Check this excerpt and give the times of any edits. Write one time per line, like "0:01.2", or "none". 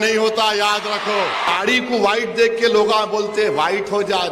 0:01.5